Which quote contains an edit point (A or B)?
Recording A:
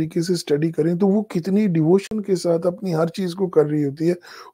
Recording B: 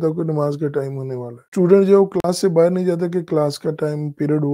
B